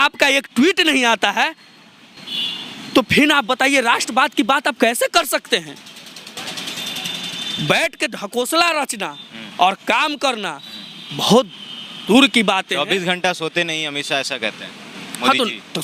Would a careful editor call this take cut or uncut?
uncut